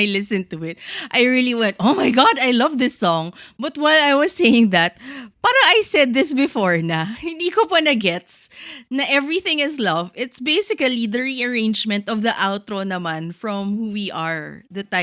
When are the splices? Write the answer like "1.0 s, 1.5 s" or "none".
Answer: none